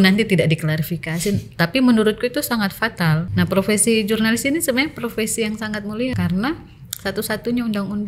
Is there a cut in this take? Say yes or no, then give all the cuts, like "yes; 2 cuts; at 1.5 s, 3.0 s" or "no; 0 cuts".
yes; 2 cuts; at 3.3 s, 6.1 s